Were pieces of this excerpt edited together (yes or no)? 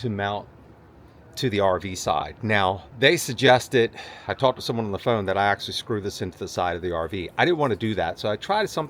no